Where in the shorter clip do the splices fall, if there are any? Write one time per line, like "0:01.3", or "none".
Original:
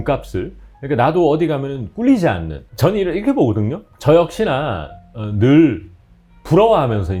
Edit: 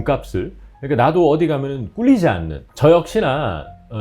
0:02.6